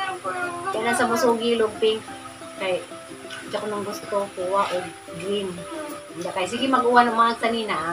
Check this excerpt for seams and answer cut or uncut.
uncut